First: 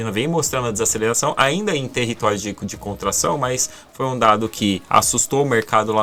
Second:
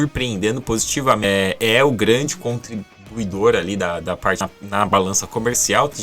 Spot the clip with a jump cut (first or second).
second